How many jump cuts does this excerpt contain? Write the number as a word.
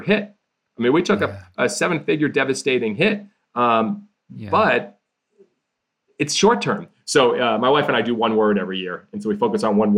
one